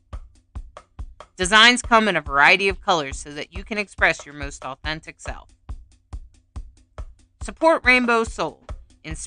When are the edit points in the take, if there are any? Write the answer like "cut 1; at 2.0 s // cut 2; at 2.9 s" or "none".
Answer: cut 1; at 1.3 s